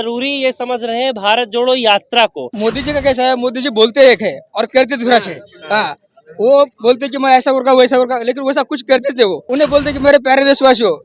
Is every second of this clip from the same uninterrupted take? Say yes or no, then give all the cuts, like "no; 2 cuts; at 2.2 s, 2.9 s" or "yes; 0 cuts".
no; 2 cuts; at 2.5 s, 9.4 s